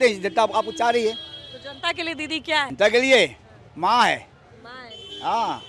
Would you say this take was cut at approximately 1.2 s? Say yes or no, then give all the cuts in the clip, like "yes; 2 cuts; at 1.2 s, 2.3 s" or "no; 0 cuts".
no; 1 cut; at 2.7 s